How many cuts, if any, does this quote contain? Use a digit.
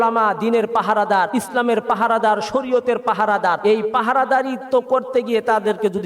2